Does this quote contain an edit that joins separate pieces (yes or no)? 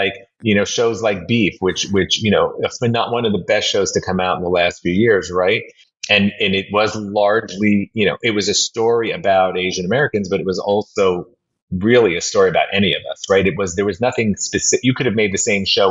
no